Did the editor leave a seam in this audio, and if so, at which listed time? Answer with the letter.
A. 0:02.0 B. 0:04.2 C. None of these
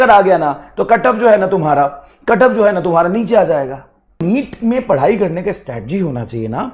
B